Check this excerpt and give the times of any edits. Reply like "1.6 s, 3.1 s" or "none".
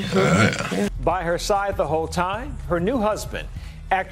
1.0 s